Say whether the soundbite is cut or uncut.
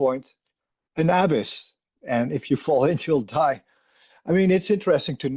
uncut